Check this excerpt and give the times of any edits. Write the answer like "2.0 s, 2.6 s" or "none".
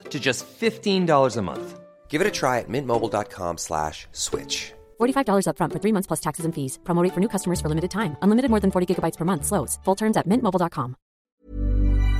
11.3 s

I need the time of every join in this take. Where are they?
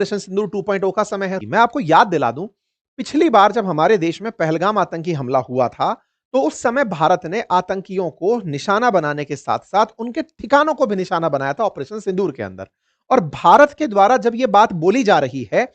1.4 s

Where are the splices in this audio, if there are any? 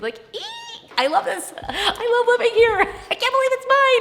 none

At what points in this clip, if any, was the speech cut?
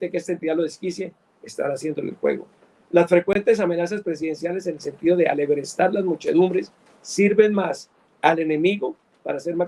none

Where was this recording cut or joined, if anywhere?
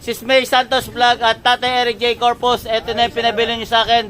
none

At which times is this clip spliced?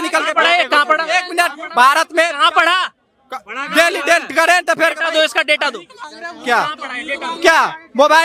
none

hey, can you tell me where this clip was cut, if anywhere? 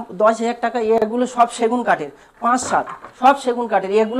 none

